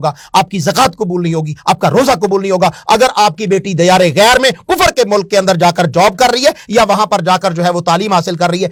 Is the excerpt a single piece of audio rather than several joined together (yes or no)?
yes